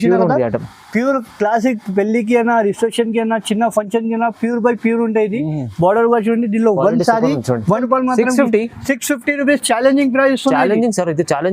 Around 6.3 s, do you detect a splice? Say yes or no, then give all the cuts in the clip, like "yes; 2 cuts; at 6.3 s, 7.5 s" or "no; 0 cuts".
no; 1 cut; at 7.8 s